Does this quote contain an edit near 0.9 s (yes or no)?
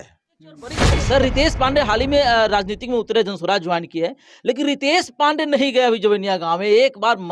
yes